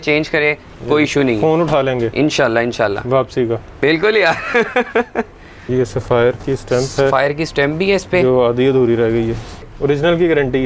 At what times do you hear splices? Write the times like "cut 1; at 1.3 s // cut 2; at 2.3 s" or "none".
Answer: cut 1; at 5.6 s // cut 2; at 9.7 s